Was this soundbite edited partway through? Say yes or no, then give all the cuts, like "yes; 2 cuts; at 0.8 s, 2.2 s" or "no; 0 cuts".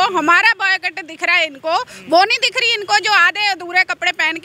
no; 0 cuts